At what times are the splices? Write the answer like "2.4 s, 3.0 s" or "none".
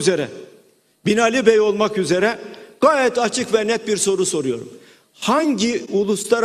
5.4 s